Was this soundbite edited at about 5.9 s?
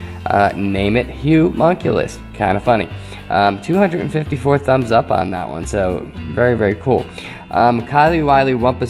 yes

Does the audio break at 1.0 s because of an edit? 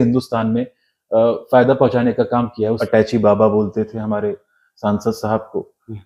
no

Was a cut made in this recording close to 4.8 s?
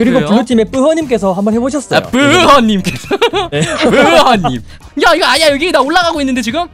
yes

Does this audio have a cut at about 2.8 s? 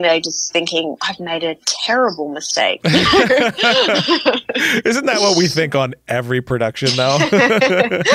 no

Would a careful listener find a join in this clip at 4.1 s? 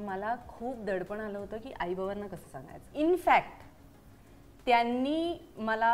no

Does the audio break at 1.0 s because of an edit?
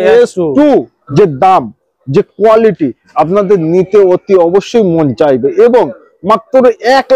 yes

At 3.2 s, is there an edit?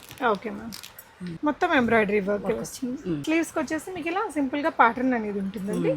yes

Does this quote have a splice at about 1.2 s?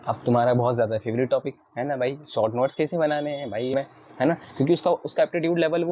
no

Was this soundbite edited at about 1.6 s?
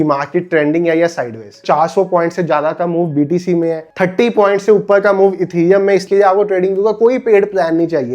yes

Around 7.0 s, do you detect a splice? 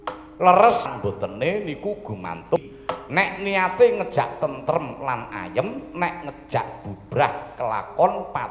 no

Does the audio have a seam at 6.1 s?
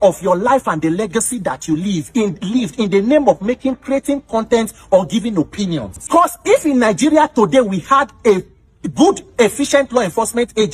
yes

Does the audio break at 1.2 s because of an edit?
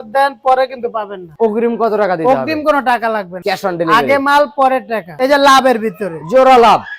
yes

